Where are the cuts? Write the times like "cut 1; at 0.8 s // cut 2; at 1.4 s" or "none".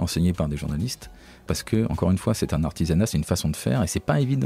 cut 1; at 1.5 s